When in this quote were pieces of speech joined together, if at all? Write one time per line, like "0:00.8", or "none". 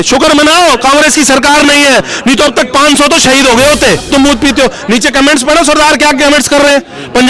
0:04.1